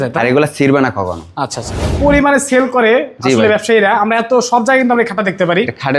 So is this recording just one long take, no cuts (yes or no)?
no